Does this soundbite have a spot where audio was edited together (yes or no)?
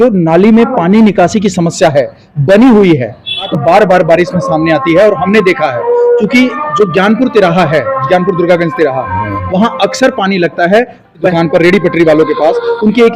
yes